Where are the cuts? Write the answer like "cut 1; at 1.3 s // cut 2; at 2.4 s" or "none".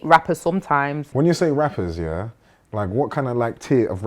cut 1; at 1.0 s